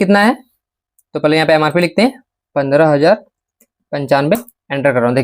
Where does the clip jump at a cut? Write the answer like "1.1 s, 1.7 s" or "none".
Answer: none